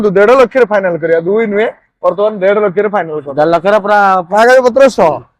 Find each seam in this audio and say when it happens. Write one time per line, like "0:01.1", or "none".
none